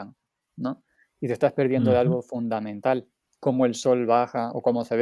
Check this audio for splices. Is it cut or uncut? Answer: cut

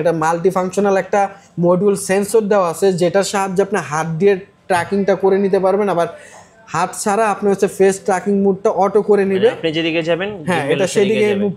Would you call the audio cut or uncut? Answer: uncut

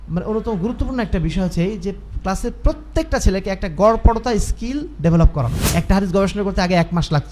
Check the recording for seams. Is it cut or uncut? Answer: cut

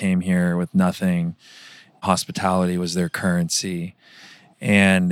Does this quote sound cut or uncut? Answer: uncut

